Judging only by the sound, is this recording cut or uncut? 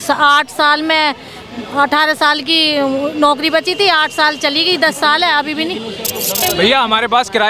cut